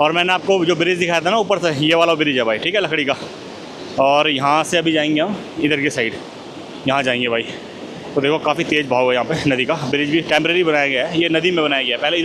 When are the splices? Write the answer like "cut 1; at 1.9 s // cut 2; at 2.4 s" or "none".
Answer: none